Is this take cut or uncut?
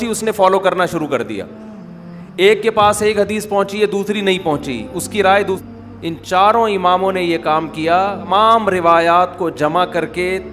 cut